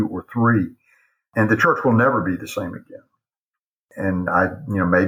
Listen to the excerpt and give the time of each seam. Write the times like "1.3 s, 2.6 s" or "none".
1.3 s